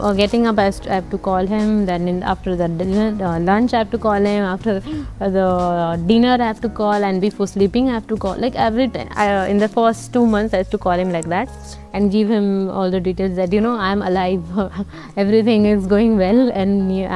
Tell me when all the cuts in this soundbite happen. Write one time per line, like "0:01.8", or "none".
none